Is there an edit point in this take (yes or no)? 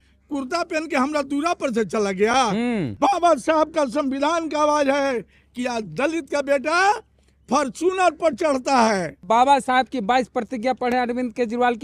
yes